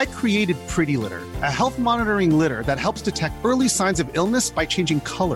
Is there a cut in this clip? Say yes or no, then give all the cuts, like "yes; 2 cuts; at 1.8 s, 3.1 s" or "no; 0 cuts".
no; 0 cuts